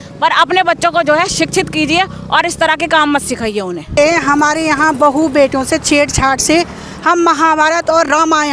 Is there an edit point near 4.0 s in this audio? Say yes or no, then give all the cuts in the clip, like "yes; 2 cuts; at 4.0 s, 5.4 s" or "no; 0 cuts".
yes; 1 cut; at 4.0 s